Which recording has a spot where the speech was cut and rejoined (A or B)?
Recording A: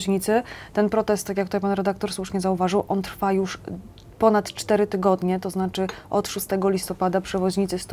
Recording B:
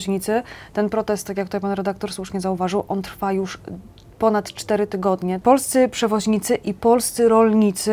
B